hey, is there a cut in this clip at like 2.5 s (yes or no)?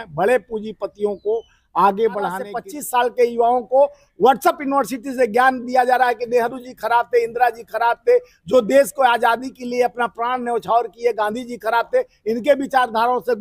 yes